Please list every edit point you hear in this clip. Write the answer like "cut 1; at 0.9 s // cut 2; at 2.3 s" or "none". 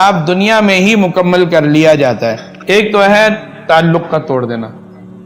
cut 1; at 2.5 s